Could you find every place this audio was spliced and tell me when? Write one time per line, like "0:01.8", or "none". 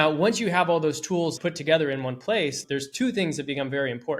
0:01.4